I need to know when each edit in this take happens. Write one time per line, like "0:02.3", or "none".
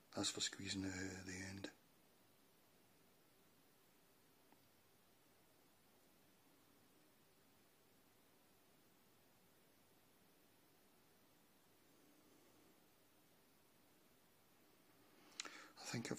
none